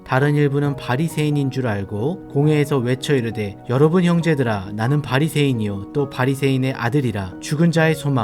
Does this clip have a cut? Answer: no; 0 cuts

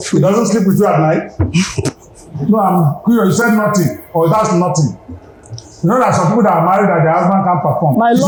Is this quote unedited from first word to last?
yes; 0 cuts

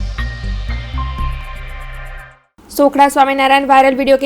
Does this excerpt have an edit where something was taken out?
yes; 1 cut; at 1.4 s

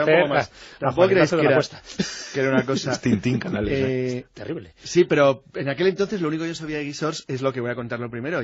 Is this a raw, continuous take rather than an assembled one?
yes; 0 cuts

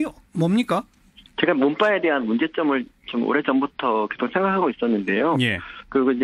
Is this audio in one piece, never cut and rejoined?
no; 1 cut; at 4.7 s

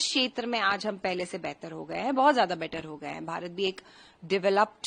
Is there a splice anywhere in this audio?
no; 0 cuts

